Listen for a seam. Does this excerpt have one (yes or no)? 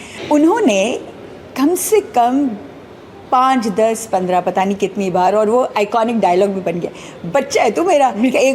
no